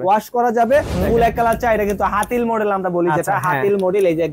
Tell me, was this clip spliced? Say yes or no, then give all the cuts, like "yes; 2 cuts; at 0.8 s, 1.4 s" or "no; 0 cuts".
yes; 1 cut; at 1.1 s